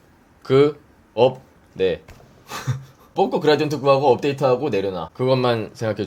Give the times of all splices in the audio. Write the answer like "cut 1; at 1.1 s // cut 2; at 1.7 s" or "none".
cut 1; at 3.1 s // cut 2; at 5.1 s